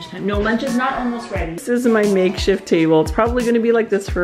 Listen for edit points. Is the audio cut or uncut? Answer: cut